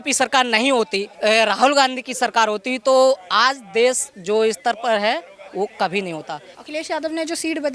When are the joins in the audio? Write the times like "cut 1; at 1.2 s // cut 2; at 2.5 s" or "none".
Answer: cut 1; at 1.0 s // cut 2; at 6.5 s